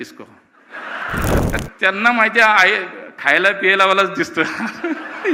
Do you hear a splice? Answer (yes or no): yes